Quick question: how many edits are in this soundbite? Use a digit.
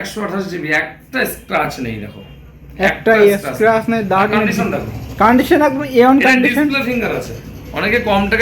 0